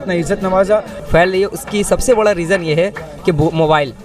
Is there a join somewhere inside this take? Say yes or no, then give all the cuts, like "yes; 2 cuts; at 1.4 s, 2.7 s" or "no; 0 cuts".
yes; 1 cut; at 1.0 s